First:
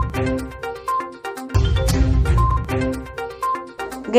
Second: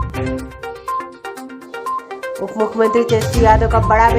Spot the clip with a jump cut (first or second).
second